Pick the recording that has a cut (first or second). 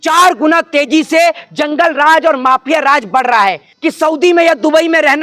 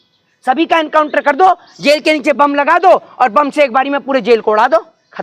first